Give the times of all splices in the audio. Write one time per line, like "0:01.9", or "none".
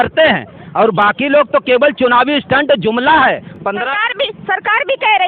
none